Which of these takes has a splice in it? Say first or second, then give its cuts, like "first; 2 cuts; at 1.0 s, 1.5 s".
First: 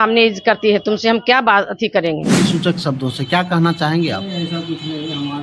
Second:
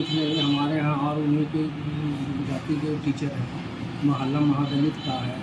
first; 1 cut; at 2.4 s